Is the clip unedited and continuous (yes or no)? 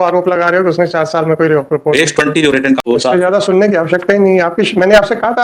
no